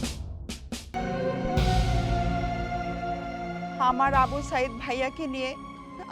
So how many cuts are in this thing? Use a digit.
1